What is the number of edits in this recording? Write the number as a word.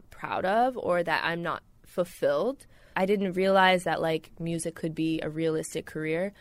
one